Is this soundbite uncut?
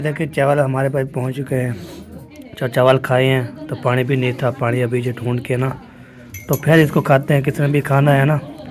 yes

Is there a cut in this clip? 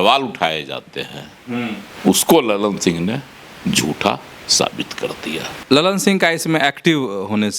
yes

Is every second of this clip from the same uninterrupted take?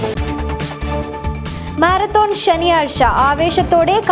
no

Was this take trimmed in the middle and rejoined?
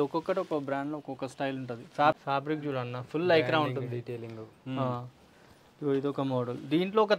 yes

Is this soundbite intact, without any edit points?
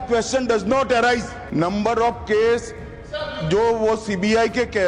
no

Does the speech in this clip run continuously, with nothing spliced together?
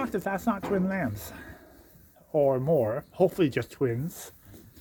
yes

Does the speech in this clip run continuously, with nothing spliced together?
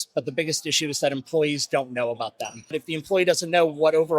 no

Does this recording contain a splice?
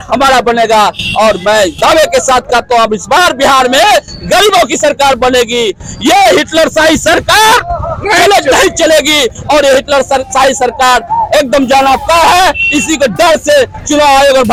no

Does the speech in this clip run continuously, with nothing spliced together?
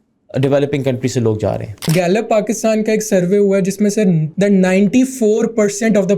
no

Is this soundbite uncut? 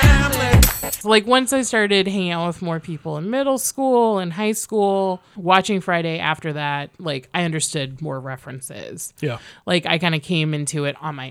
no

